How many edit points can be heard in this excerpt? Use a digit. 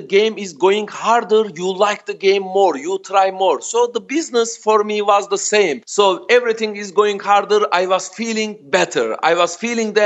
1